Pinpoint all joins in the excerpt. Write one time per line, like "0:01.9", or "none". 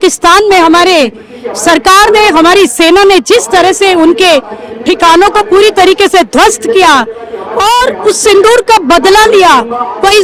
none